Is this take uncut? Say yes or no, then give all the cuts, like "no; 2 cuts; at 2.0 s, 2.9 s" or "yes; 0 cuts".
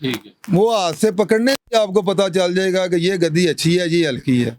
yes; 0 cuts